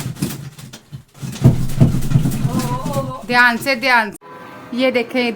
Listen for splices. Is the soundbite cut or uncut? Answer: cut